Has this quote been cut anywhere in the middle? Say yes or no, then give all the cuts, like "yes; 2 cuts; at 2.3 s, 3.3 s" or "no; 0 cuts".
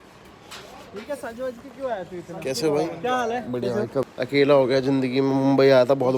yes; 1 cut; at 3.9 s